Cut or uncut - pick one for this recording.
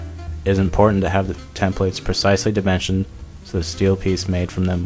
uncut